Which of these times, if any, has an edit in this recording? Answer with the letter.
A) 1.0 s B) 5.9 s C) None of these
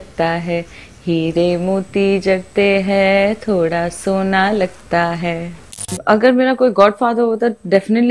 B